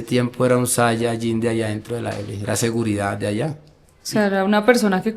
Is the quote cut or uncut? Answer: uncut